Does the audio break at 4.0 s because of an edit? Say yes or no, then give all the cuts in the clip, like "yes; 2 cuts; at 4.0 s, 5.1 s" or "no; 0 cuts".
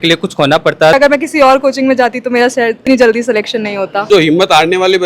yes; 2 cuts; at 0.9 s, 4.0 s